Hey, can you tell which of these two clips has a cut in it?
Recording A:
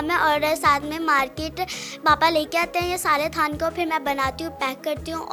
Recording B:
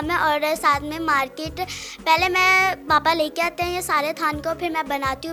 A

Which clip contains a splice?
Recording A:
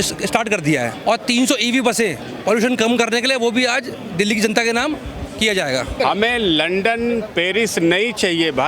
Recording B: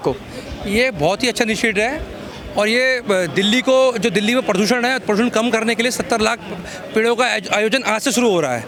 A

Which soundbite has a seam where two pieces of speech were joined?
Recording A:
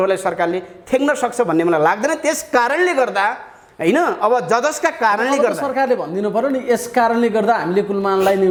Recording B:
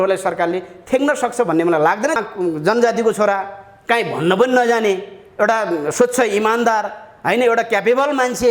B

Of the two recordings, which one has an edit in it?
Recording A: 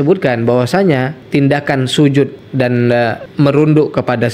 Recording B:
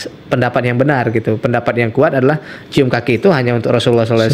A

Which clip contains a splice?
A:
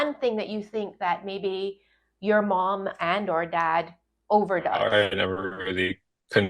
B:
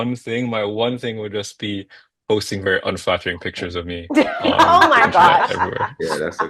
A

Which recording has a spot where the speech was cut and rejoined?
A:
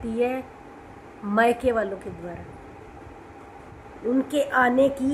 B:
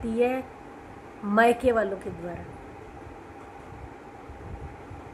A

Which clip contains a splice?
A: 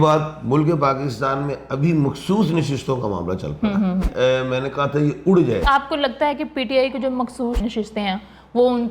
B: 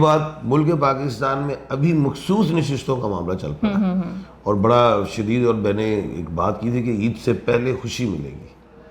A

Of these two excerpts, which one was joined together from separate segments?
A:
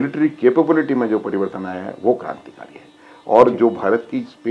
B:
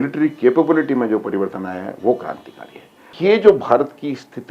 B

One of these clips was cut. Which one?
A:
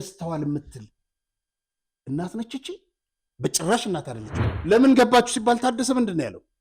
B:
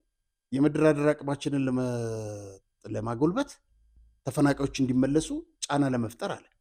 A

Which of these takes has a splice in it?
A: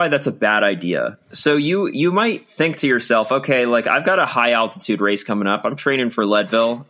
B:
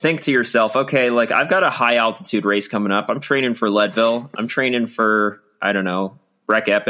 A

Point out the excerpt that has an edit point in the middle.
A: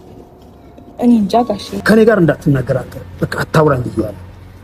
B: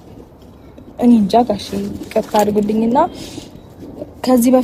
A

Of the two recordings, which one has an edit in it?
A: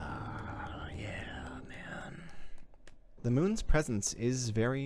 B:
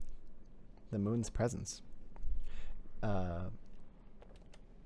A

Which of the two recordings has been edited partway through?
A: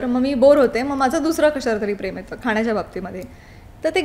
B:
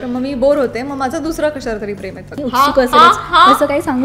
B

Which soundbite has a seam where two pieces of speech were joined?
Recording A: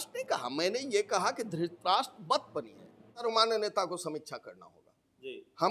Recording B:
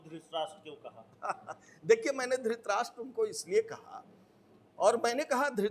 A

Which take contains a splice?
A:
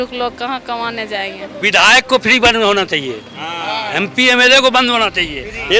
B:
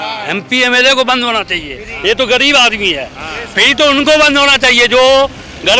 A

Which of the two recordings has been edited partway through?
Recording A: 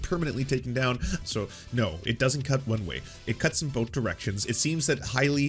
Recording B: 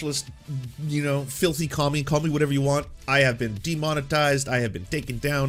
A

